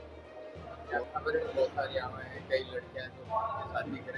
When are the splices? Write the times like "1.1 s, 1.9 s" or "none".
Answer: 0.9 s